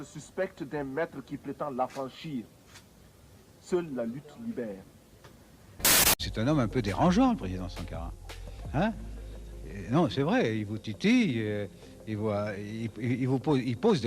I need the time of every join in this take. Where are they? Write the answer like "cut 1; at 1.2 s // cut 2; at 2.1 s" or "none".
cut 1; at 5.8 s